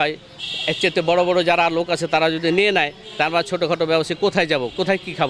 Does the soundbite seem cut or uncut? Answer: uncut